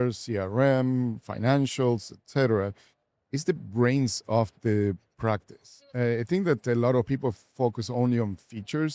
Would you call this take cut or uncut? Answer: cut